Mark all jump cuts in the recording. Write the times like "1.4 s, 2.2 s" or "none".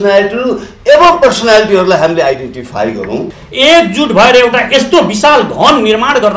3.4 s